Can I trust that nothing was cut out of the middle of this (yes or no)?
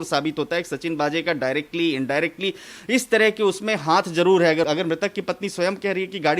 no